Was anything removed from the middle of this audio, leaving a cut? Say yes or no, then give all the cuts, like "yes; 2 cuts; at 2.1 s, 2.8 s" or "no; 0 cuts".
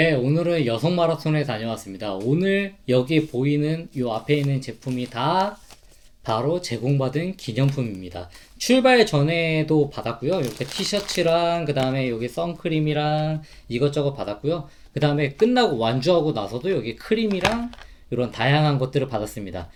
no; 0 cuts